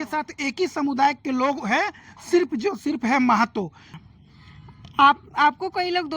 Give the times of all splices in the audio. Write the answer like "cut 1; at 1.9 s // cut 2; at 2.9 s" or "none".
cut 1; at 4.3 s